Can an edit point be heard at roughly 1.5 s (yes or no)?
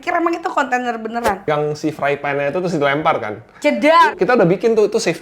yes